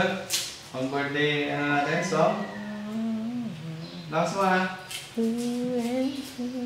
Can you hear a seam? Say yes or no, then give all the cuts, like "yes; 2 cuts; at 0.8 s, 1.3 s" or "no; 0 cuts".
no; 0 cuts